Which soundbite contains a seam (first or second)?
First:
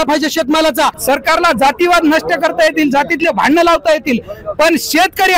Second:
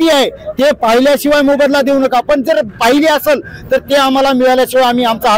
first